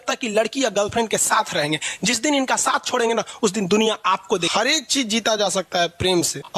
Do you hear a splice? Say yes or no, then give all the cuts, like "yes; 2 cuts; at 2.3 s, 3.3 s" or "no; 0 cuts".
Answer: yes; 1 cut; at 4.5 s